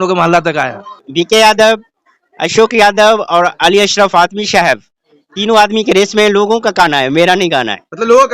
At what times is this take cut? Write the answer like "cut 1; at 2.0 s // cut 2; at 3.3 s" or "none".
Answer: cut 1; at 1.0 s